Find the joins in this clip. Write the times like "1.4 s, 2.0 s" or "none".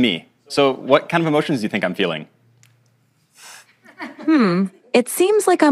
none

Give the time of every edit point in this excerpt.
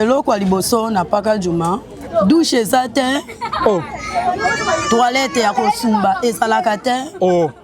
2.0 s

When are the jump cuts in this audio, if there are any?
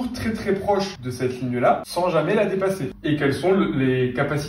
1.0 s, 1.9 s, 2.9 s

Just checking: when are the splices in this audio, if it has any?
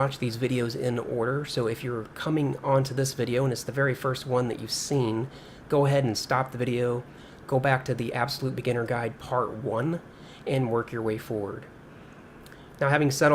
3.6 s

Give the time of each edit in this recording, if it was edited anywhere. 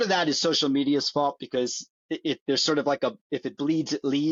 none

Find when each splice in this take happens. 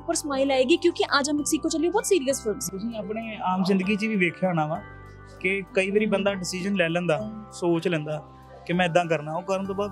2.6 s

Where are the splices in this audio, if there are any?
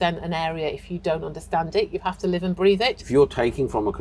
3.0 s

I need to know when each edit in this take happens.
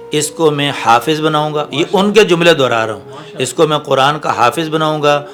none

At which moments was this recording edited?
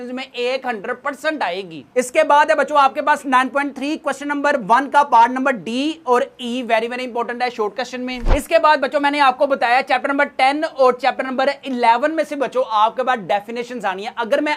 none

